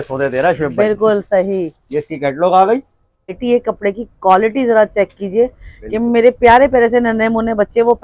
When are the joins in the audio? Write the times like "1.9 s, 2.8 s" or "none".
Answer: 3.4 s